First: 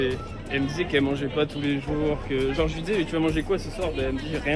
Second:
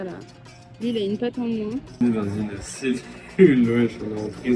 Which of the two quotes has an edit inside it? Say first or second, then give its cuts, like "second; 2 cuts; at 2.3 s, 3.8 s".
second; 1 cut; at 2.0 s